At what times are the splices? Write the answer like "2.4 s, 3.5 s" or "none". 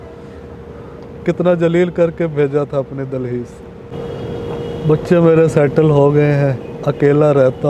3.9 s